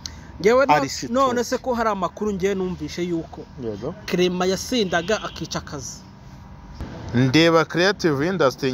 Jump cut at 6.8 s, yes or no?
yes